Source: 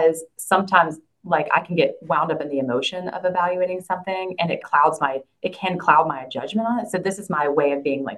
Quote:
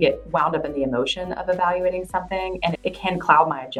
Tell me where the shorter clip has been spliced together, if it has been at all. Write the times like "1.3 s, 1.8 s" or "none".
2.8 s